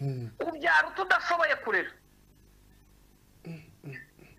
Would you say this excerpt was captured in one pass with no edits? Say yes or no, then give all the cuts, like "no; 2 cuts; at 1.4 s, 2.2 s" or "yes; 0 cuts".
yes; 0 cuts